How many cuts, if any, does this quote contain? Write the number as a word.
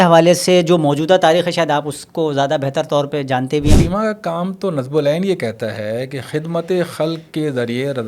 one